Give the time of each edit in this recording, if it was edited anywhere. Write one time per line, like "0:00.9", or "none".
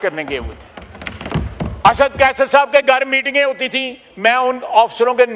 0:01.2